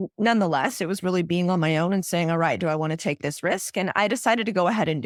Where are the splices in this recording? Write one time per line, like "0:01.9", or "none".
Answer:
none

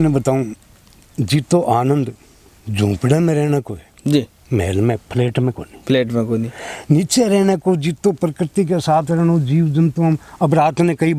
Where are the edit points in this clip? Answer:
none

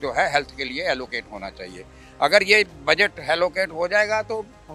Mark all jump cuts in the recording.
none

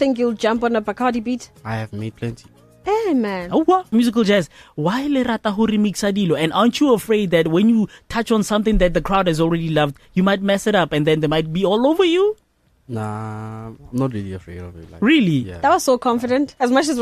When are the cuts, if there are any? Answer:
0:03.9

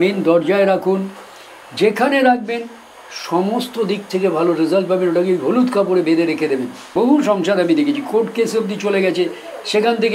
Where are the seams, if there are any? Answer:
0:06.8

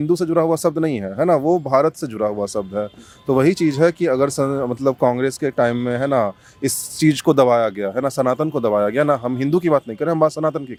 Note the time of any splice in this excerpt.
none

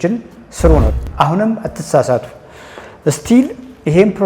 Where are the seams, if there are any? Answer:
0:00.9

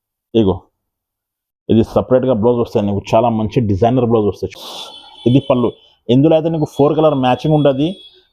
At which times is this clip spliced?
0:04.5

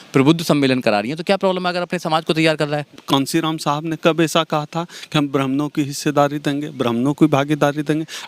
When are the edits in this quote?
0:02.9

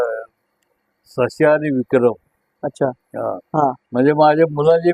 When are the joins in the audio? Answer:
none

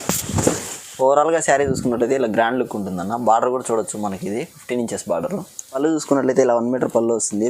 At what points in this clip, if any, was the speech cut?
0:05.8

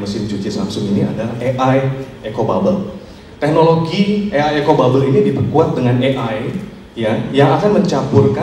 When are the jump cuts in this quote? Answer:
none

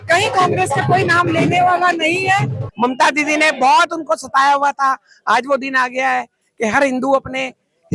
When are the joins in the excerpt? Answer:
0:02.7

